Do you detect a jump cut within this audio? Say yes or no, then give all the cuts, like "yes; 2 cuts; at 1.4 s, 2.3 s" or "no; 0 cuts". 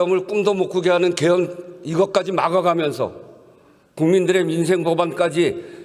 no; 0 cuts